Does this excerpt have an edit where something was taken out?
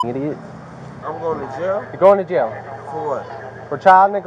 yes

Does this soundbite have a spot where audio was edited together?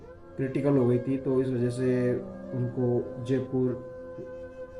no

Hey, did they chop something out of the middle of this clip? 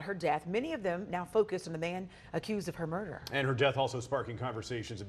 no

